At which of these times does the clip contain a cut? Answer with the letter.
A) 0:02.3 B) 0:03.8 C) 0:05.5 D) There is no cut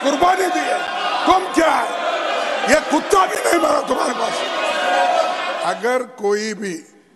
C